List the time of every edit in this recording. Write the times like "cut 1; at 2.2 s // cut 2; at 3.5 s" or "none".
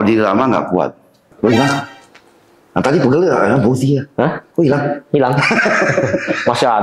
cut 1; at 1.3 s